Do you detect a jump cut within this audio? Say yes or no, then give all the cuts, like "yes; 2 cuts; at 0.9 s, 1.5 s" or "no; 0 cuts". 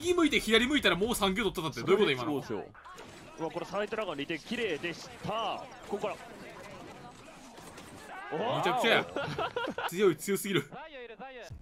no; 0 cuts